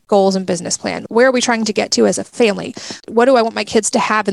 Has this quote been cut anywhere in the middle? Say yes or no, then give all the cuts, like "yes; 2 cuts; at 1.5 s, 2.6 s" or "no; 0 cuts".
yes; 1 cut; at 1.0 s